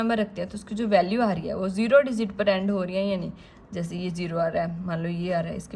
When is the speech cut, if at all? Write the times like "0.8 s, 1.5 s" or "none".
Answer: none